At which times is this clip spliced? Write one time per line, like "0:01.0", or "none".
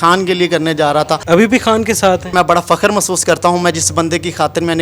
0:01.2
0:02.3